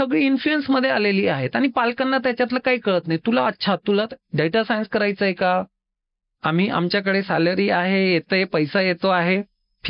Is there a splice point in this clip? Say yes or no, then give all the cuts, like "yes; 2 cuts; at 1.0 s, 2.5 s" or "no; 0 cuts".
no; 0 cuts